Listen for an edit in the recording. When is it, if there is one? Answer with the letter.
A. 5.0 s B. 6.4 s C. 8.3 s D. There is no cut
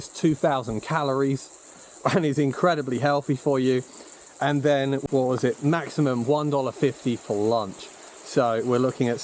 A